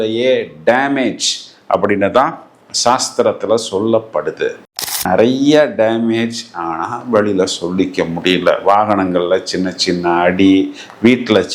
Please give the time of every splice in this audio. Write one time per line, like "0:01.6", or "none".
0:04.8